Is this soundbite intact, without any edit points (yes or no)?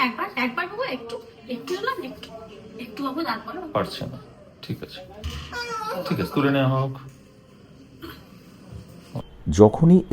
no